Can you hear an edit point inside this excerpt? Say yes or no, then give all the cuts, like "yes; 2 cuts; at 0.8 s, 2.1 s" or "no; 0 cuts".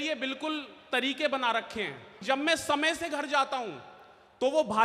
yes; 1 cut; at 2.1 s